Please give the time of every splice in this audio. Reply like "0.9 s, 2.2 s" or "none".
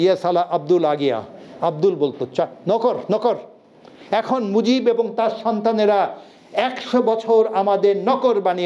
none